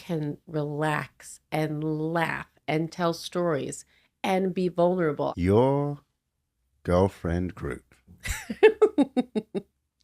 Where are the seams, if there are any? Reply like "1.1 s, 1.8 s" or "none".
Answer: 5.3 s